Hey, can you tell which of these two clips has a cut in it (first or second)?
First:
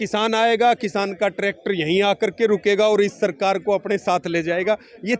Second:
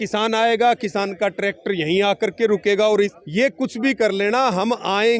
second